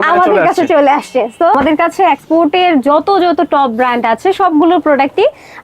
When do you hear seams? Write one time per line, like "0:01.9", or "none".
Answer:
0:01.5

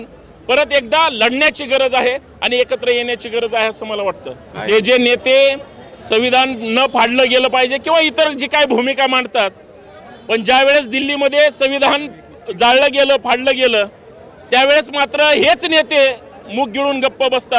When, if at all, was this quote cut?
0:04.5

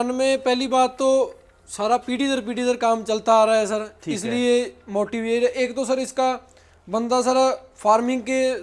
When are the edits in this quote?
none

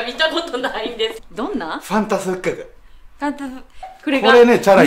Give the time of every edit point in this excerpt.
0:01.2
0:03.9

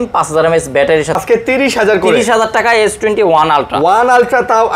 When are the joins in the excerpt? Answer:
0:01.2

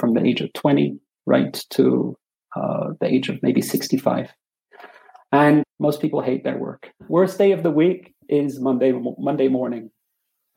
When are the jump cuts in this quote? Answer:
0:05.7
0:06.9

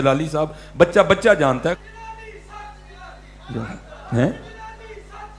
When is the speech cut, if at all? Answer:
0:01.7

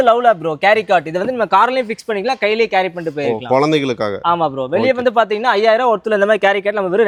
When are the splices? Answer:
none

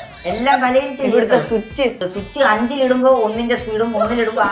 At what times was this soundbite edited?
0:02.0

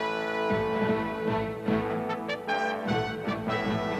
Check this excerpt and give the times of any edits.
0:02.5

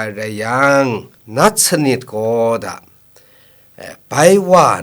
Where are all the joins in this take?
0:01.1

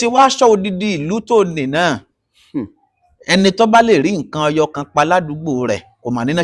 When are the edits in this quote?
none

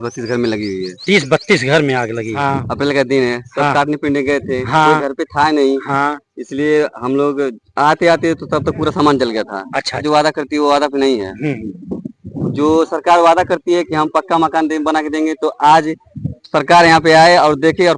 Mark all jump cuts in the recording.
0:02.3
0:10.0

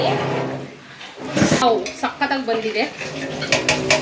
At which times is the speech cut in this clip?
0:01.6

